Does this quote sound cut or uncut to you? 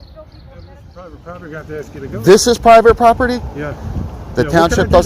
cut